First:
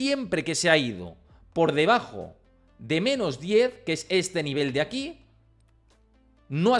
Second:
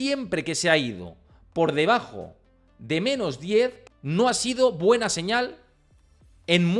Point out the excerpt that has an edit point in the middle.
second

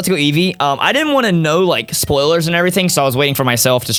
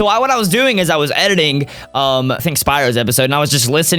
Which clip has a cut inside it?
second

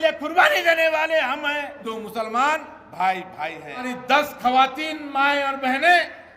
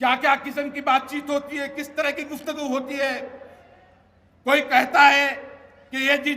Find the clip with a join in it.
first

